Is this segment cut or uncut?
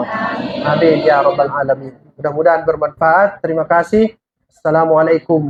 uncut